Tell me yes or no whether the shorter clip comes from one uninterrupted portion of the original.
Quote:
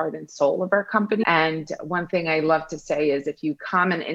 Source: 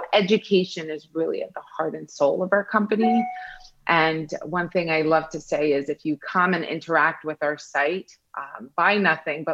no